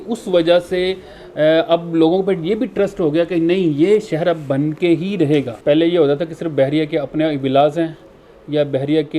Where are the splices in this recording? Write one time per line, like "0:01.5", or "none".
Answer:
0:05.5